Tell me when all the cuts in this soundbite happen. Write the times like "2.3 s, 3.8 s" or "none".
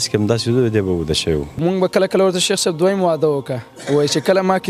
1.6 s